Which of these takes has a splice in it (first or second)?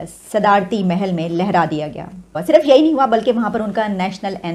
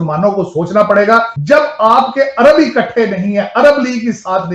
second